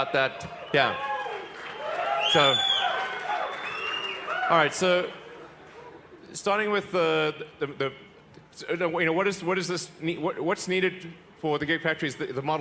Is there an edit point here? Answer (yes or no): no